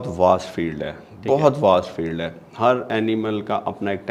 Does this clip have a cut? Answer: no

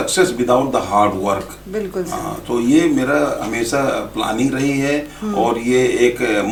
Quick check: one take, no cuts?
yes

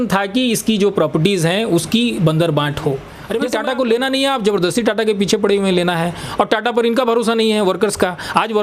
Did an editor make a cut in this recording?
yes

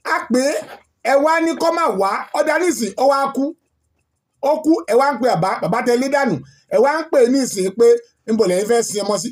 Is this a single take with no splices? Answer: yes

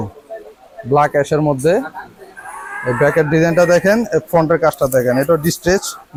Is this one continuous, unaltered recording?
yes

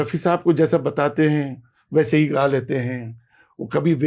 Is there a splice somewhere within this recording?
no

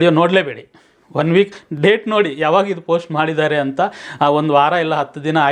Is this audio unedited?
yes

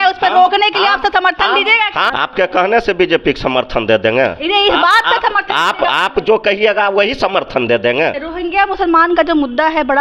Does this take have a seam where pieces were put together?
yes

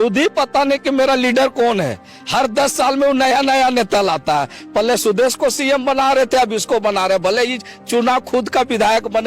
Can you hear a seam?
no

